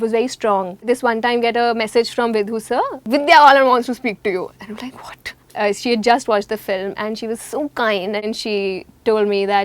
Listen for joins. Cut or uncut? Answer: cut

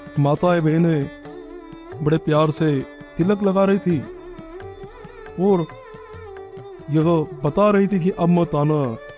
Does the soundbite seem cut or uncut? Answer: cut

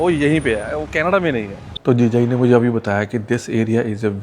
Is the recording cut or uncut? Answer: cut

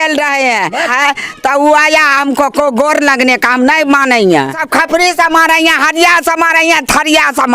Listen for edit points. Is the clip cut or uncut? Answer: cut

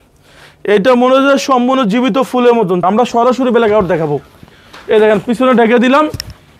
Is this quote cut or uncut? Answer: cut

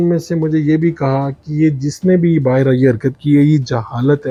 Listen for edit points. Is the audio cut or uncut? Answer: uncut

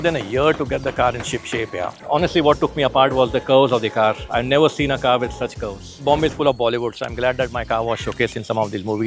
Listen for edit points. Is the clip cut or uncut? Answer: cut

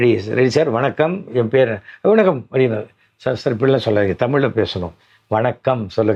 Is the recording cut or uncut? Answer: uncut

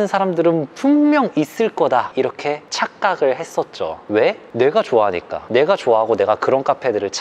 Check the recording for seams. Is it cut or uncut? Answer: uncut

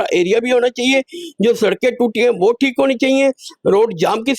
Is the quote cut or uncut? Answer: uncut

